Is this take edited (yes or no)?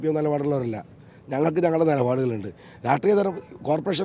no